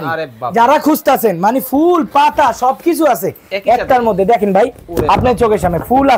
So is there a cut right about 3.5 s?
no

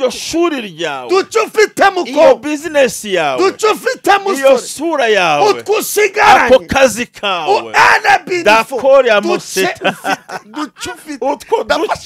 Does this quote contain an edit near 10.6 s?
no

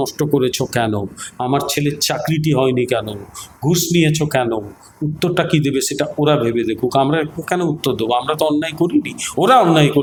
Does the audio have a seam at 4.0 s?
no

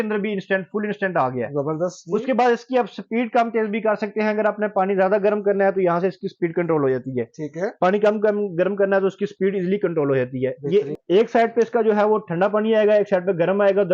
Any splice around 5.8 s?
no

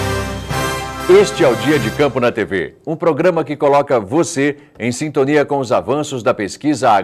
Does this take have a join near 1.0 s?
yes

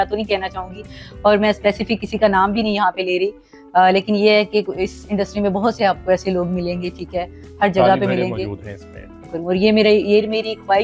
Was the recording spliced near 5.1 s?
no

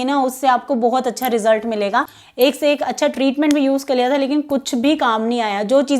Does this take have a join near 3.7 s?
no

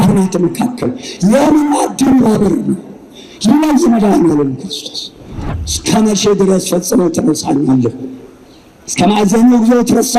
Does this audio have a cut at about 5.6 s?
yes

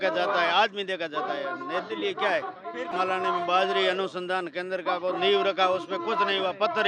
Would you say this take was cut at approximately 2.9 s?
yes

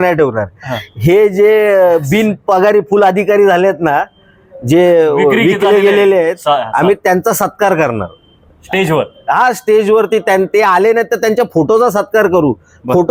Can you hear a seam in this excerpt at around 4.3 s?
no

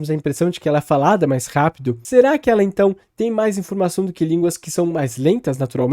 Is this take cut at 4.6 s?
no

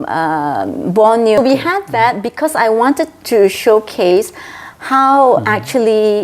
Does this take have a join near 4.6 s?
no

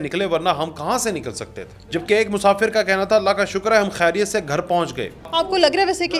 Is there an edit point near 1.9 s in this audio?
yes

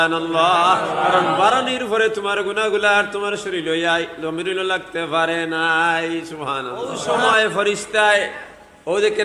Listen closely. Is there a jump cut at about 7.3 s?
yes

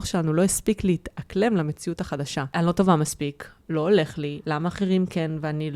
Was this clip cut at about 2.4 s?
yes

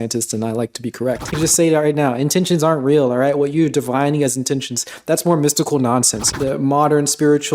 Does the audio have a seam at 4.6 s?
no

